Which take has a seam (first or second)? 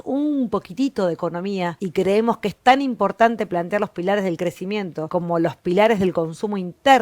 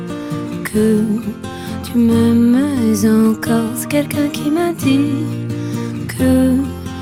first